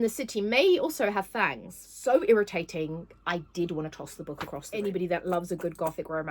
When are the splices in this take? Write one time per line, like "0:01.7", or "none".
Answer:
0:01.9
0:04.7